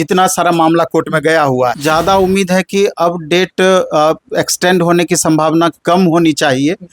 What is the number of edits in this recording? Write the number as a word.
one